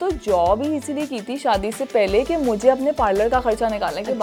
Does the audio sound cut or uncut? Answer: uncut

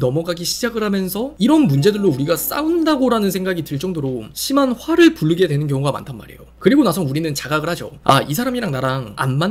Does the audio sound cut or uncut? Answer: cut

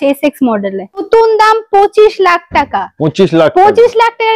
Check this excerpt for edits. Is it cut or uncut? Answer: cut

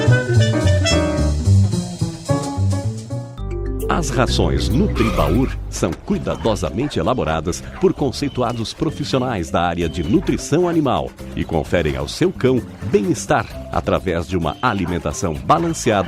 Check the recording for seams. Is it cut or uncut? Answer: cut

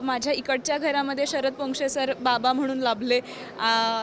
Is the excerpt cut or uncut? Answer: uncut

